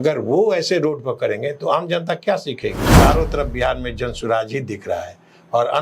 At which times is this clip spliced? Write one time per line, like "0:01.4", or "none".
0:02.8